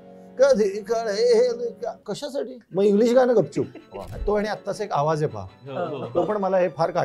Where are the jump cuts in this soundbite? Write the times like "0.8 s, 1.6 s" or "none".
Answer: 4.1 s